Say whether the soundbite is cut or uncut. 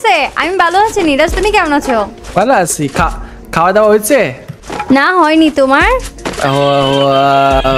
cut